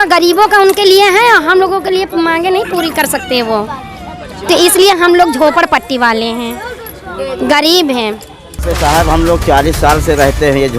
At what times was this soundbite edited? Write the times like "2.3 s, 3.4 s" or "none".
8.6 s